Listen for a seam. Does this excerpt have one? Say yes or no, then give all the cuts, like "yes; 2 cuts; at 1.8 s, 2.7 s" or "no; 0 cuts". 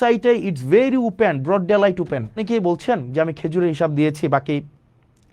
yes; 1 cut; at 2.5 s